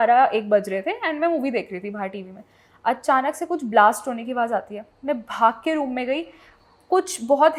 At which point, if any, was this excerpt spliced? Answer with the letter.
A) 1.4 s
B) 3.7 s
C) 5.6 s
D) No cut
D